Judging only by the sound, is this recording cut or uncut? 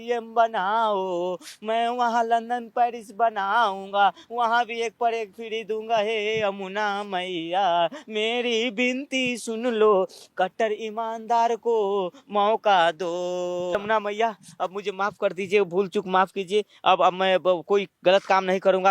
cut